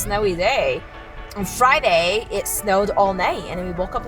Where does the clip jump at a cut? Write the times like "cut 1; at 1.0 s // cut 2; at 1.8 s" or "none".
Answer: cut 1; at 1.2 s